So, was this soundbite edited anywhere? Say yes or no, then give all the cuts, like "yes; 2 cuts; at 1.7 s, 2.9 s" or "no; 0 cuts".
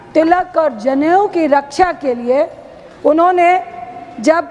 no; 0 cuts